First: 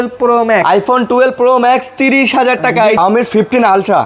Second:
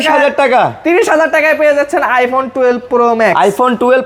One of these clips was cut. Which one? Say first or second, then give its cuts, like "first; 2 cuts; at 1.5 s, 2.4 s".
first; 1 cut; at 3.0 s